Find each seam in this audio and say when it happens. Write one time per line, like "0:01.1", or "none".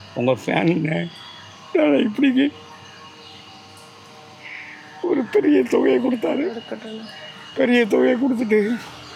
none